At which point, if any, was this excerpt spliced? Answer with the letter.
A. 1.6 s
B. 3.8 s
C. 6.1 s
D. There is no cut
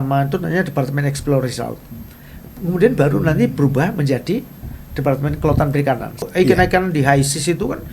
C